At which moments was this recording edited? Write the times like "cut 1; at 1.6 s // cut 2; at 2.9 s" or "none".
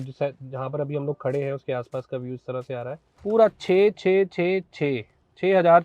cut 1; at 3.0 s

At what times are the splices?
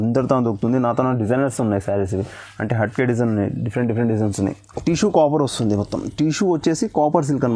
cut 1; at 4.7 s

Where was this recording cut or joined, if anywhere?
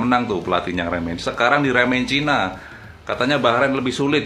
none

